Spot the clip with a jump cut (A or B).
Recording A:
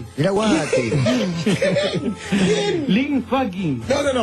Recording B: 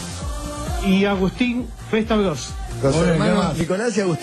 B